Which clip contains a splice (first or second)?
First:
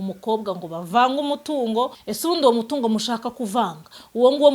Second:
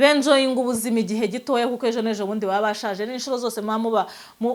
first